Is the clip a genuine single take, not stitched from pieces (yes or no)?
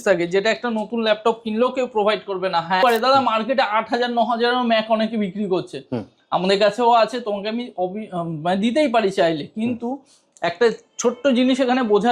no